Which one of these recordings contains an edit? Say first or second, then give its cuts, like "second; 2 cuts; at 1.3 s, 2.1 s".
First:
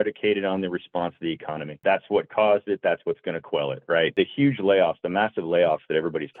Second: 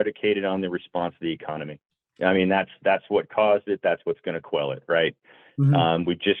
first; 2 cuts; at 1.7 s, 4.1 s